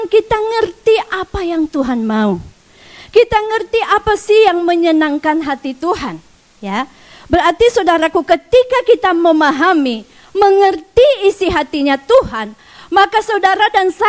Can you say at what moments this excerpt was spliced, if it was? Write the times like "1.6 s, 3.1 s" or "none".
none